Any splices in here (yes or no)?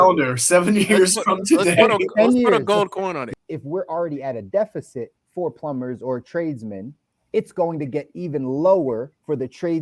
yes